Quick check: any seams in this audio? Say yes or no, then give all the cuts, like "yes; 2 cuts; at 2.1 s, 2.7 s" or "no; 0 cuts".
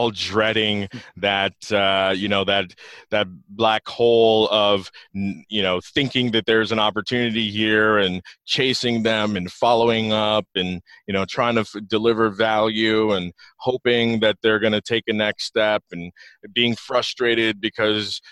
no; 0 cuts